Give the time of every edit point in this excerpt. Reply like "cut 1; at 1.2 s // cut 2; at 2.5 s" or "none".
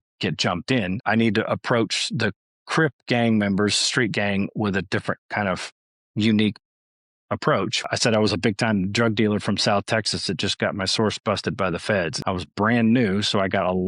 cut 1; at 1.0 s // cut 2; at 7.9 s // cut 3; at 12.2 s